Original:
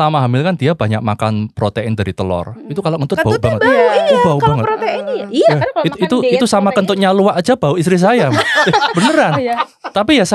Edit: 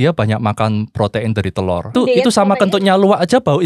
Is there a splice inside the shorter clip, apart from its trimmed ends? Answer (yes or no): yes